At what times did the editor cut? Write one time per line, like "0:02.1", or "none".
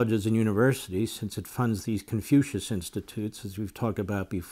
none